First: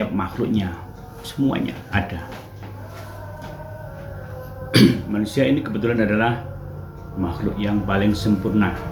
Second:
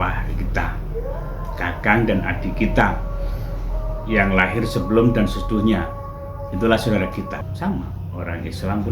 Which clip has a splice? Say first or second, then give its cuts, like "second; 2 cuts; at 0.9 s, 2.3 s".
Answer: second; 1 cut; at 7.4 s